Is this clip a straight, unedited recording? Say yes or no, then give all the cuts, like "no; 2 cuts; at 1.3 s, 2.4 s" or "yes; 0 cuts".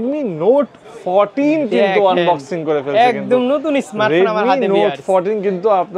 yes; 0 cuts